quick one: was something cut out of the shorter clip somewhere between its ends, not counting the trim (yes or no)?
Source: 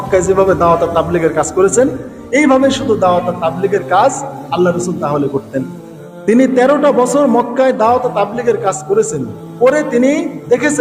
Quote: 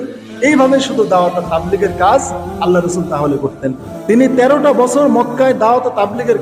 yes